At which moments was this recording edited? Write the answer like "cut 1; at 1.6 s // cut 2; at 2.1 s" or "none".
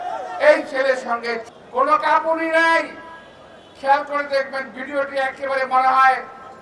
cut 1; at 1.5 s